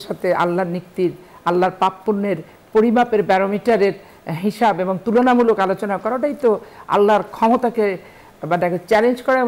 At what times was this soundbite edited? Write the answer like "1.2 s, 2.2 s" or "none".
none